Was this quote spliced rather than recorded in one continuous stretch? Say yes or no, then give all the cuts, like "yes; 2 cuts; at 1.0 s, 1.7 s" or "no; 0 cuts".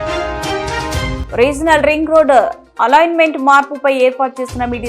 yes; 1 cut; at 1.2 s